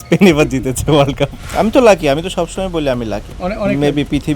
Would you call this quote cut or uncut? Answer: cut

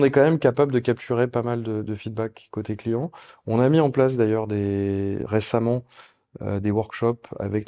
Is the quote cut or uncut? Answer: uncut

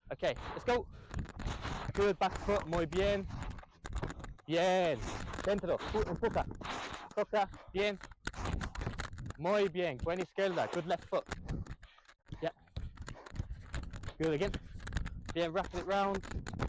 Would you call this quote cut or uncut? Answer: uncut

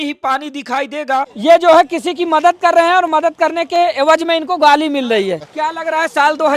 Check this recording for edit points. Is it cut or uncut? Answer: cut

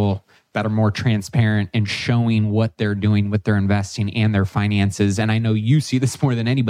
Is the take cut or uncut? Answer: uncut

